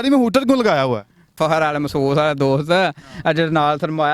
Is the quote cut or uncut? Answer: cut